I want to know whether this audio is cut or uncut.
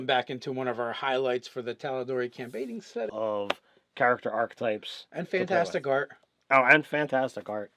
uncut